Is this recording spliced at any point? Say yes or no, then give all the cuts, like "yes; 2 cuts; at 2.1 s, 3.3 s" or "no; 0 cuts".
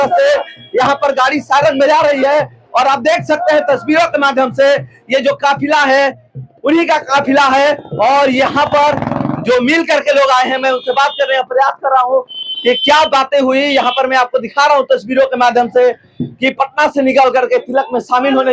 no; 0 cuts